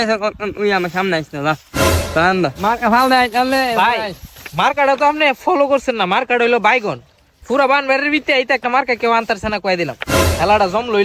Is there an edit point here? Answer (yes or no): no